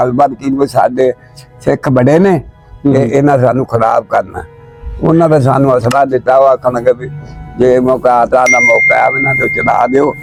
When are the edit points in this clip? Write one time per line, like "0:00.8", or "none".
none